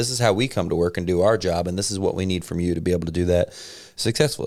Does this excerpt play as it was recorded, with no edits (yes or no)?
yes